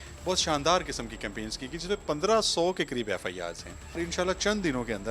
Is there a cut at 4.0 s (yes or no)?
yes